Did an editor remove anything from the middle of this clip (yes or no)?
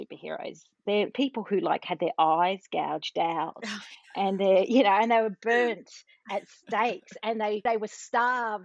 yes